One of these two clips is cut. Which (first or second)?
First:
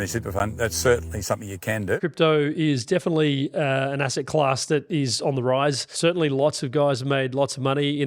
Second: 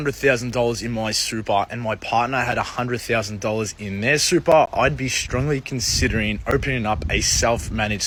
first